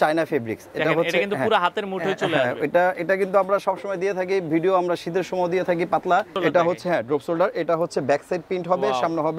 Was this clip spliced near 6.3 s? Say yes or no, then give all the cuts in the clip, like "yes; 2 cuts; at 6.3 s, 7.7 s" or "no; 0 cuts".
yes; 1 cut; at 6.3 s